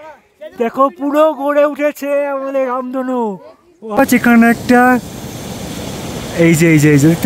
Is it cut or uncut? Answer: cut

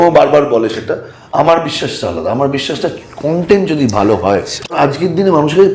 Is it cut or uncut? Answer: cut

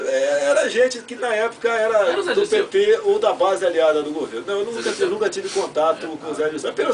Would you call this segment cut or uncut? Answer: uncut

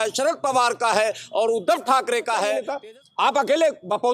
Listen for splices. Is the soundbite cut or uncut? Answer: cut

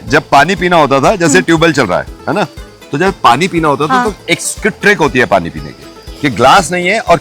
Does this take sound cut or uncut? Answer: uncut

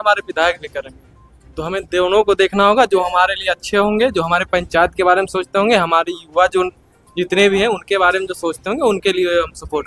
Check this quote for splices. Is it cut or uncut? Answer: uncut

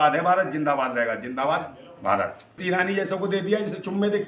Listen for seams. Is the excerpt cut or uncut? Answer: cut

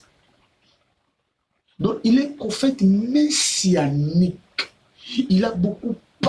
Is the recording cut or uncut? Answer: uncut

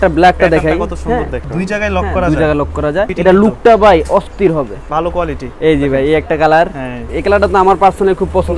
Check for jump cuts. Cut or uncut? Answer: cut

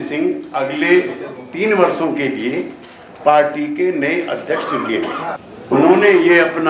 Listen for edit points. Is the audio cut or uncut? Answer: uncut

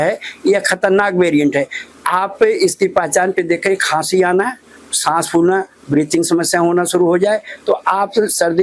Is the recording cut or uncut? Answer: uncut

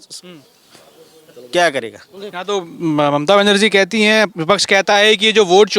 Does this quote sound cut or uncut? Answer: uncut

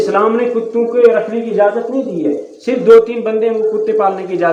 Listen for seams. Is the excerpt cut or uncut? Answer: uncut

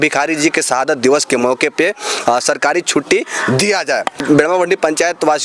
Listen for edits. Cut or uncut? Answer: uncut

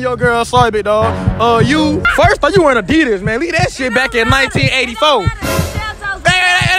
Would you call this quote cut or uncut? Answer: cut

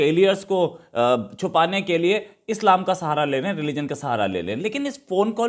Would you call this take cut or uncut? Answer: uncut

